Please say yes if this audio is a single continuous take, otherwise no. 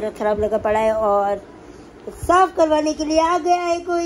yes